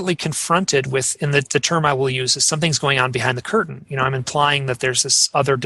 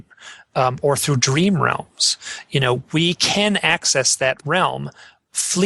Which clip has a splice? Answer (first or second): second